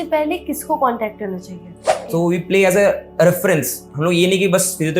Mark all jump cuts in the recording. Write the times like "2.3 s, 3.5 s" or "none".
2.0 s